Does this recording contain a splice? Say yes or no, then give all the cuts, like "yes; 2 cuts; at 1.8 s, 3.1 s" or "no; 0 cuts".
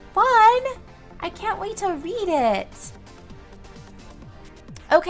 no; 0 cuts